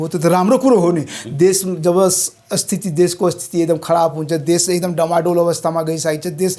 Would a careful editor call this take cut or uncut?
uncut